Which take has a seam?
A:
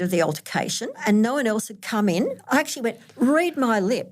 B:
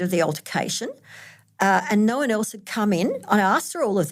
A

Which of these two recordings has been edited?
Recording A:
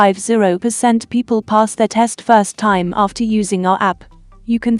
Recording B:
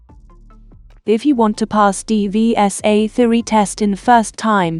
B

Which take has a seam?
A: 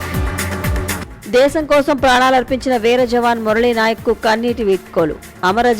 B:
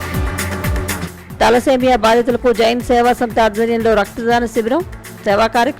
B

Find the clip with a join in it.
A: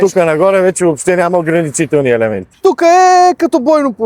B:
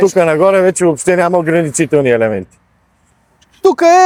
A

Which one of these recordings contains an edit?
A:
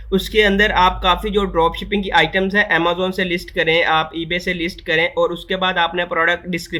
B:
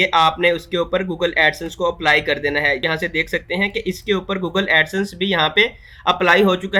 B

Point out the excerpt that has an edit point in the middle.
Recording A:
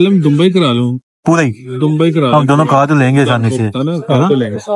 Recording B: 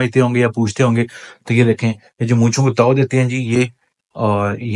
A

